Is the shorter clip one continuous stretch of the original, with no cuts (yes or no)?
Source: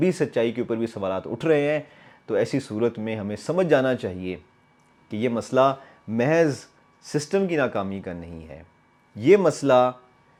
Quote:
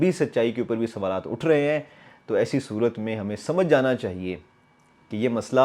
yes